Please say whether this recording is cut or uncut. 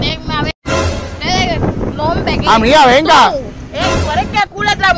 uncut